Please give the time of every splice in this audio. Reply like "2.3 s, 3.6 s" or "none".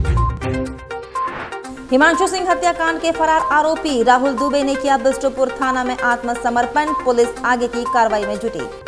1.7 s

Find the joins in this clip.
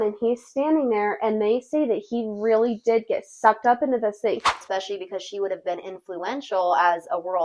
4.5 s

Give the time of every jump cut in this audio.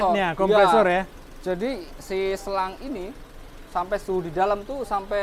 1.2 s

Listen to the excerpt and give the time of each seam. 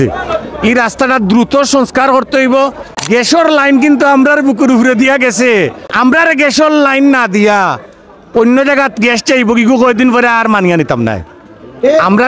2.9 s, 5.8 s

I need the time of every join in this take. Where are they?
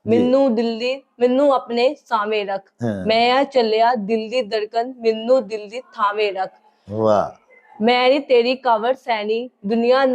none

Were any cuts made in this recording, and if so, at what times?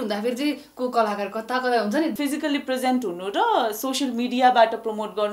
2.1 s

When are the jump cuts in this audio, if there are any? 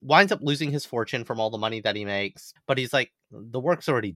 2.5 s

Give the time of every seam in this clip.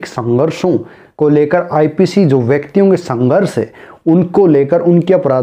none

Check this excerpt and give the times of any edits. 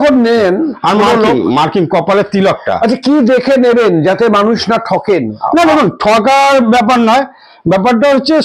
none

